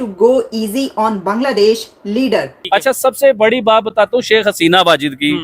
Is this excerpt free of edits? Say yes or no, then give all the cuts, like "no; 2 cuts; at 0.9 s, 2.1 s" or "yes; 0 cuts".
no; 1 cut; at 2.6 s